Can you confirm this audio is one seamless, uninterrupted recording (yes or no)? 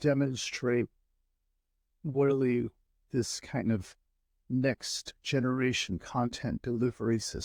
yes